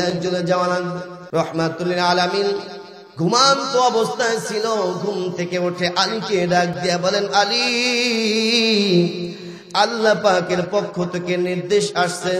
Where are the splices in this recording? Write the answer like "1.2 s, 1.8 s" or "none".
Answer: 1.1 s